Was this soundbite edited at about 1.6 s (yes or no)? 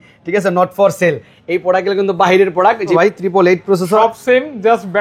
no